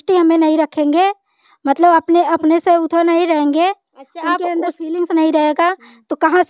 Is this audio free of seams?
yes; 0 cuts

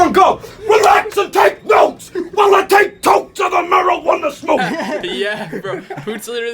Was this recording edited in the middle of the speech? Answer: yes; 1 cut; at 4.6 s

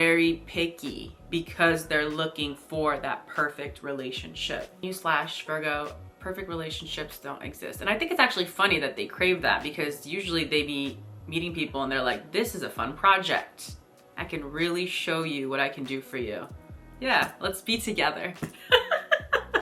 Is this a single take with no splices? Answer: no; 1 cut; at 4.8 s

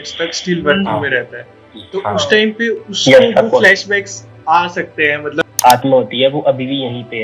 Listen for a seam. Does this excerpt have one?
yes; 1 cut; at 5.4 s

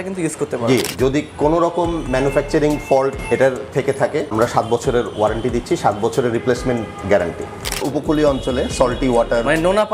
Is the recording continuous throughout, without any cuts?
no; 2 cuts; at 0.9 s, 7.8 s

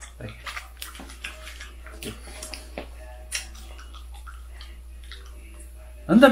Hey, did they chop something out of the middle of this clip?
no; 0 cuts

